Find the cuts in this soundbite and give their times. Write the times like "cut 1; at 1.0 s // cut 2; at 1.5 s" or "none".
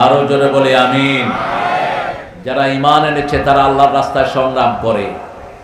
cut 1; at 2.3 s